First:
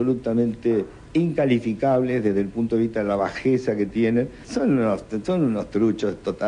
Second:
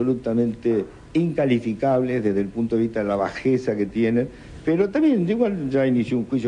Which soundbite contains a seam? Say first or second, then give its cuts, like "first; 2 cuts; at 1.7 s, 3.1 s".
first; 1 cut; at 4.4 s